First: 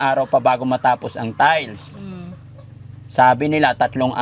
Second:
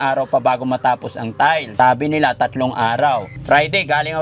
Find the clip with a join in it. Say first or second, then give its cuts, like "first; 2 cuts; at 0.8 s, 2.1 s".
second; 2 cuts; at 1.7 s, 3.3 s